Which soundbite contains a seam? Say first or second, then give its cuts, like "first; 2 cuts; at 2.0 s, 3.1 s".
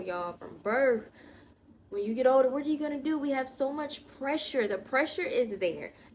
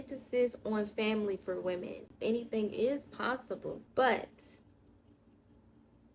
second; 2 cuts; at 2.2 s, 3.8 s